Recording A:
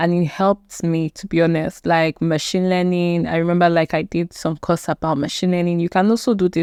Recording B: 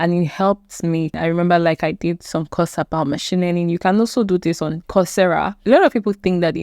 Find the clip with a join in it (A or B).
B